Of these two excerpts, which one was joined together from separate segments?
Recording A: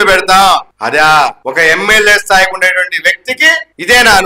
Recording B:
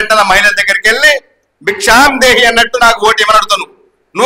A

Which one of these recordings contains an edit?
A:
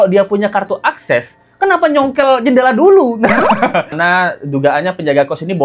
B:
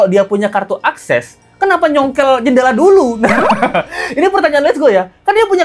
A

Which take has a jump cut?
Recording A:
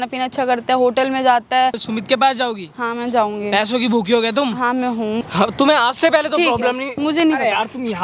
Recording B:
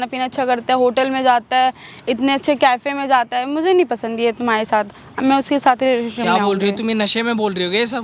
A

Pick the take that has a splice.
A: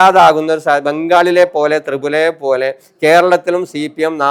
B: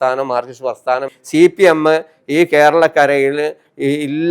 B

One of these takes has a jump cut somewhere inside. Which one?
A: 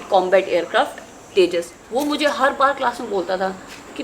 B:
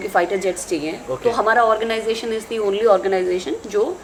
A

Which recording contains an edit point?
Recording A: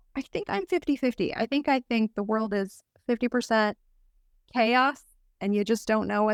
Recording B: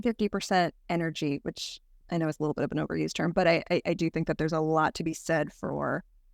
B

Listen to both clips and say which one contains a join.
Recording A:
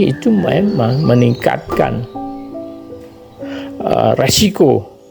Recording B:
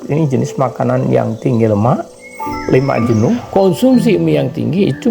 B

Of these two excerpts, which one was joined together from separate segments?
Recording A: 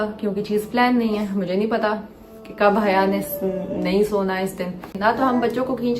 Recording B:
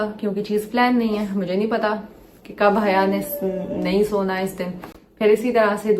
A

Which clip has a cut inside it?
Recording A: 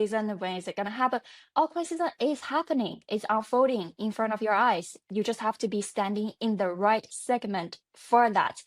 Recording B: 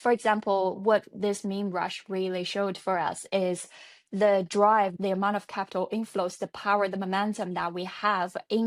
A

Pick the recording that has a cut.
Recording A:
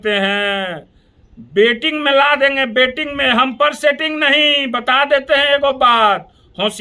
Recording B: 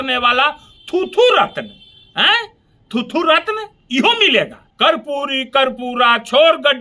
B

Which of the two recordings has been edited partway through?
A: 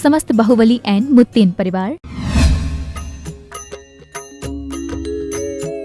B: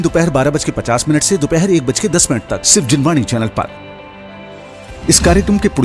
A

